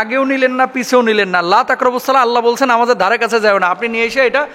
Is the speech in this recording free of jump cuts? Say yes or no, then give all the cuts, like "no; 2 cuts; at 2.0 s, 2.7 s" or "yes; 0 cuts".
yes; 0 cuts